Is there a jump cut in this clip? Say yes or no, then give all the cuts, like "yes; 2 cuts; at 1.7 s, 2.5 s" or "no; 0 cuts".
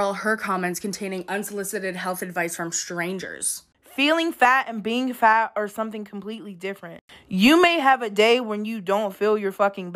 yes; 1 cut; at 3.6 s